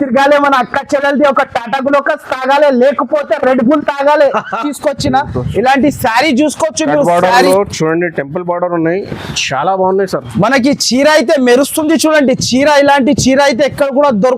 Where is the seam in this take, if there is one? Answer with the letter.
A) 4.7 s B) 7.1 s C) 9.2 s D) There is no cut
A